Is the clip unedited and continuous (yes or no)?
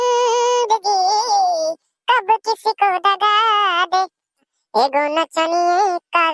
no